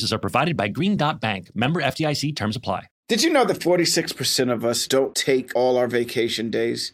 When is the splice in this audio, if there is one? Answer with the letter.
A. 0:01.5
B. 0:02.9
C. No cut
B